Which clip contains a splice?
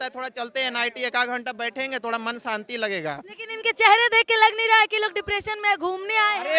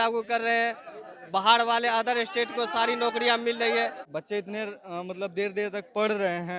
second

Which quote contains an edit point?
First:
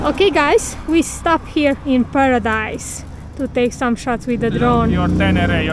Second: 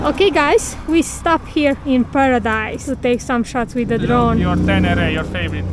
second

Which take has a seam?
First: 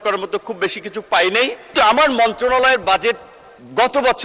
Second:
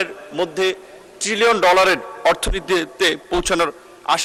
first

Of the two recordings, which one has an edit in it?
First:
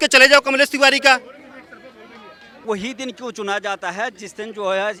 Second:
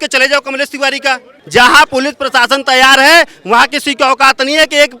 second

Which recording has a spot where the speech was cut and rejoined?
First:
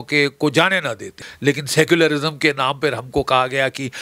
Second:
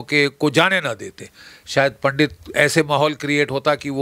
first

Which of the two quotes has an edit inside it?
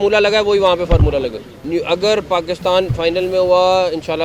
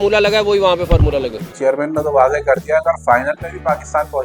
second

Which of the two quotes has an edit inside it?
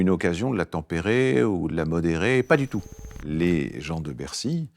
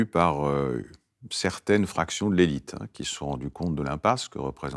first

